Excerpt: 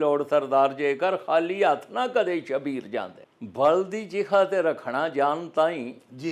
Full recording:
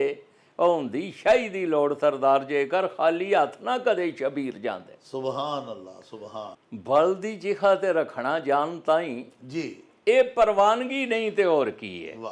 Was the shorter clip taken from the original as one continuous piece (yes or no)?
no